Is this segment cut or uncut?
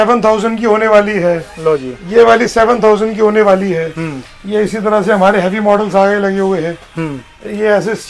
uncut